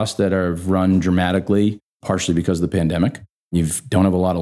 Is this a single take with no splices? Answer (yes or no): no